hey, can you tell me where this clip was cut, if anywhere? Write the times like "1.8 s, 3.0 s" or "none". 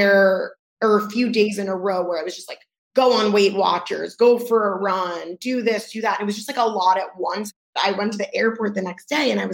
7.8 s